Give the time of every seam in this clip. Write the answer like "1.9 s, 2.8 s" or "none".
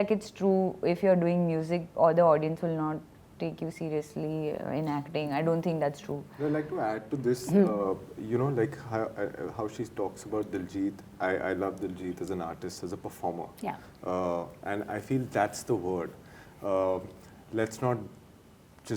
none